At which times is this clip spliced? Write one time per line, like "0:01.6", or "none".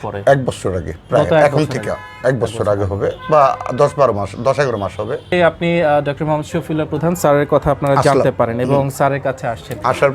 0:05.3

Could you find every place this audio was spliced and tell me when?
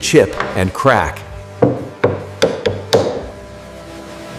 none

